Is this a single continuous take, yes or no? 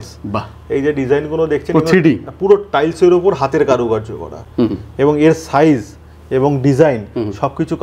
yes